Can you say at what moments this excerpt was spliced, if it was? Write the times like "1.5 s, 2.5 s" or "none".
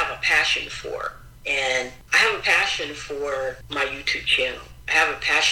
2.0 s, 3.6 s